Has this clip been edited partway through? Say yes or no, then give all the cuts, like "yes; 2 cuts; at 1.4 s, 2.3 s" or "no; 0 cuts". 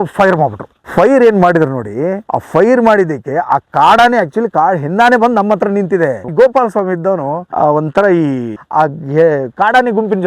yes; 2 cuts; at 6.3 s, 8.5 s